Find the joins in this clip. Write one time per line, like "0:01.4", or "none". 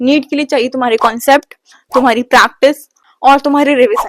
none